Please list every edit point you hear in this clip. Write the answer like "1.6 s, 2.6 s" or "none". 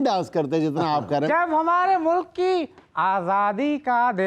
1.2 s